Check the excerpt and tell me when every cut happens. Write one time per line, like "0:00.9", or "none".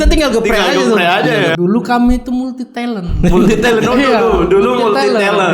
0:01.5

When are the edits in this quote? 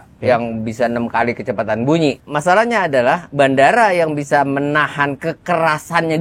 0:02.2

